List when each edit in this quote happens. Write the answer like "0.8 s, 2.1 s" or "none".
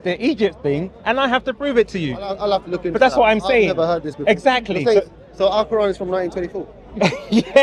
none